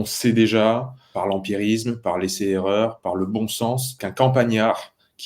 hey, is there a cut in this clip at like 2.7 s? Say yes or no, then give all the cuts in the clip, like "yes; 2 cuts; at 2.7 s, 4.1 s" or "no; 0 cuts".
no; 2 cuts; at 1.0 s, 4.0 s